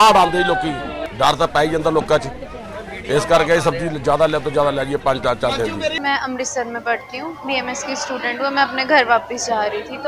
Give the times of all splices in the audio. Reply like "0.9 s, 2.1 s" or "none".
1.0 s, 6.0 s